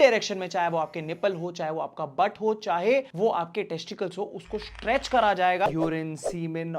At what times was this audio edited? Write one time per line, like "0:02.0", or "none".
0:05.7